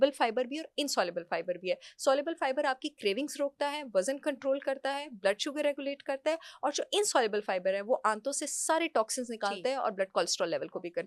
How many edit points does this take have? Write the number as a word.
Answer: zero